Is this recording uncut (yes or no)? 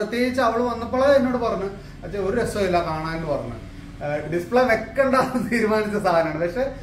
yes